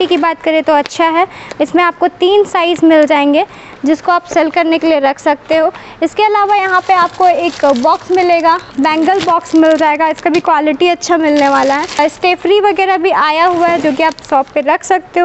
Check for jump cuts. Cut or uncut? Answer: uncut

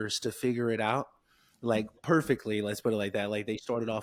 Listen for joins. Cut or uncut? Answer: uncut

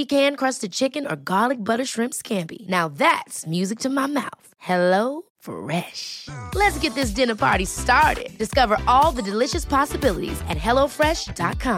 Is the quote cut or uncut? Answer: uncut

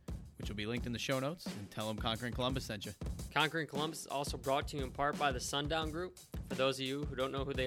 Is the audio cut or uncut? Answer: cut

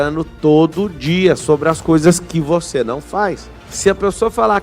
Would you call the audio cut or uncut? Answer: cut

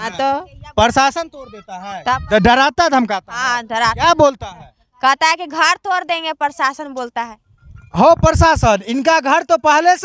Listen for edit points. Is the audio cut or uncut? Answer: uncut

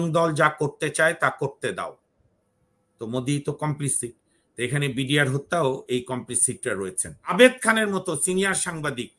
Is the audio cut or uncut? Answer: cut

